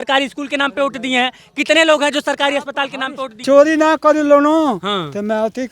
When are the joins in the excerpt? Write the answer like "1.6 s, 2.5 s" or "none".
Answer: 3.4 s